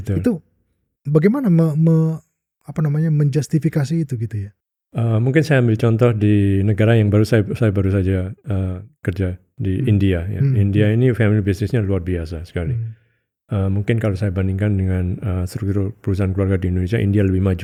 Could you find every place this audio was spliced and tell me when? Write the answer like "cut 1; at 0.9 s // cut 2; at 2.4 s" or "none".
none